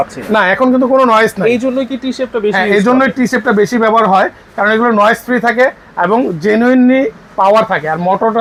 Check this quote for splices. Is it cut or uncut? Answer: uncut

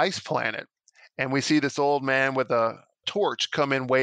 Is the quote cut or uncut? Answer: cut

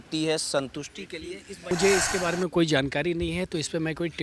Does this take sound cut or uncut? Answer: cut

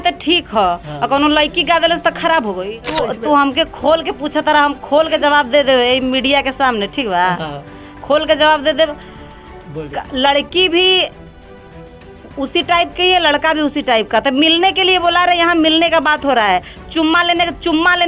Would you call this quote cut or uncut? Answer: cut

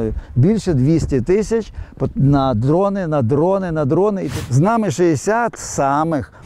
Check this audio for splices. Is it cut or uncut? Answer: cut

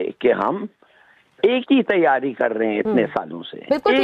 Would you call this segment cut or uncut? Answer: uncut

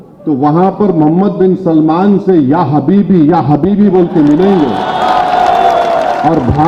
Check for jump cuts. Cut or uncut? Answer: uncut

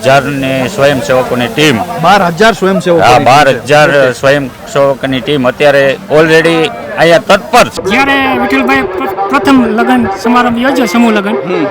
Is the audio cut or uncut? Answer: cut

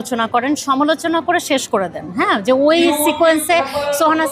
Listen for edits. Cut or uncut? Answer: uncut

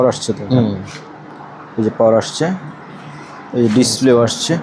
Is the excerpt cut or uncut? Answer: uncut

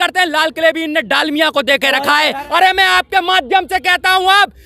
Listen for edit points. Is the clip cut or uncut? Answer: cut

